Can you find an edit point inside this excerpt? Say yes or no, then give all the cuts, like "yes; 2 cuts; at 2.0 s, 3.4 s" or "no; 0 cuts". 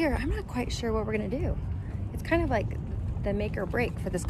no; 0 cuts